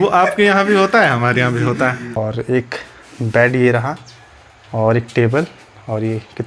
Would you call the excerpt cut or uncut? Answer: cut